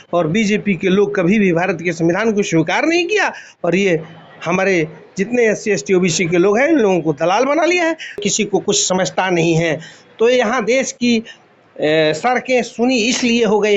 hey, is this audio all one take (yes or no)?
no